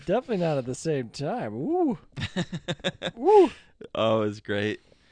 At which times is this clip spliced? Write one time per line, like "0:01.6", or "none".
none